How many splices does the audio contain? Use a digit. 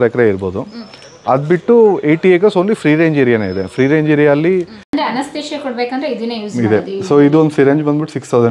1